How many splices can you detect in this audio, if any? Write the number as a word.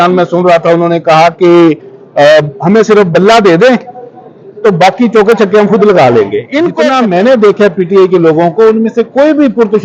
one